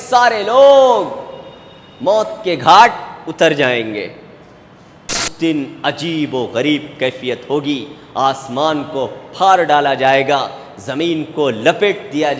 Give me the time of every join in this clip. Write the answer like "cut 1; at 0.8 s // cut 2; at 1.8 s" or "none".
cut 1; at 5.3 s